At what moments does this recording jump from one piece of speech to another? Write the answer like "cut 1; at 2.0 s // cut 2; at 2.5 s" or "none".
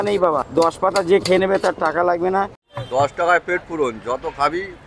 cut 1; at 2.6 s